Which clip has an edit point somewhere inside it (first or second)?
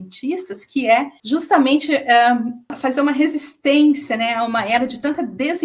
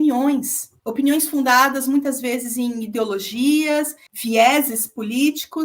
first